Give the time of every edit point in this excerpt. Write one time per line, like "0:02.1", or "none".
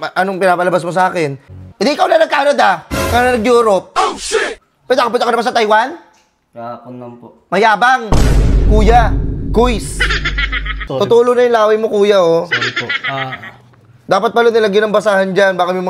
0:01.5
0:10.8

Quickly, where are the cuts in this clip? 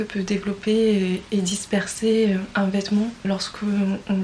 0:01.2
0:03.3

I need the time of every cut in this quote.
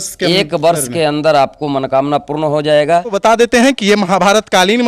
0:03.2

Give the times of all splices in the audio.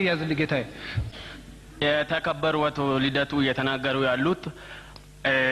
0:01.0

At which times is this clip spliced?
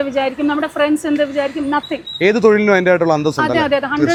none

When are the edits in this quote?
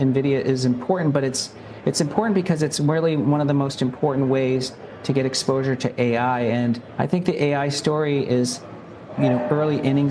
0:06.9

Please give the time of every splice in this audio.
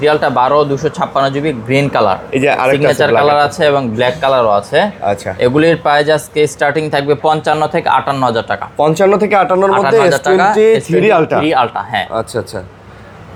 none

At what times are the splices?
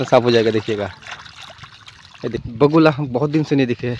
0:02.4

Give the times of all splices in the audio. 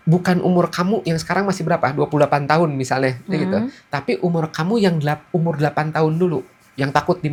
none

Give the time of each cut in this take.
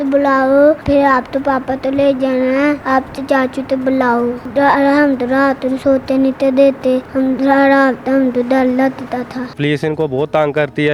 0:00.8
0:02.8
0:04.4
0:07.1
0:09.5

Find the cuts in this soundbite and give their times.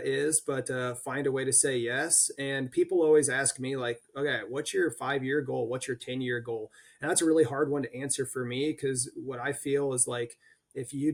none

